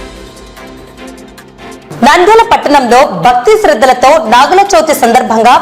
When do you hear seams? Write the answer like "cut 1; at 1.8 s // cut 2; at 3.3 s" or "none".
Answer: cut 1; at 1.7 s